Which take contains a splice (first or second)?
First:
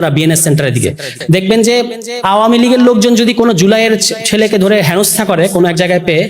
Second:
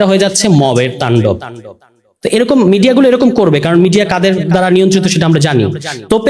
first